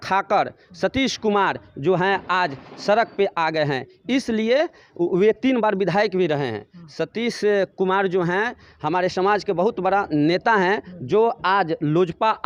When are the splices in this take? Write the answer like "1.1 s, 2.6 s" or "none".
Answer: none